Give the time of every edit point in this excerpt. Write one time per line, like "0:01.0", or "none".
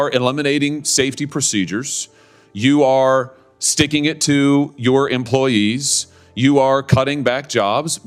none

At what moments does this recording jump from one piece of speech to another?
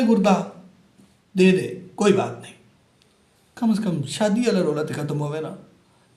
none

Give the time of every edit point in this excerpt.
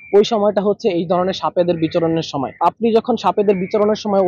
0:02.5

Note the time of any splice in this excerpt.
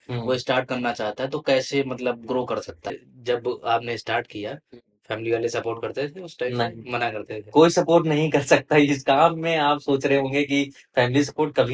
0:03.0

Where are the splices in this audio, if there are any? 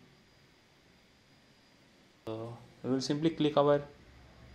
0:02.3

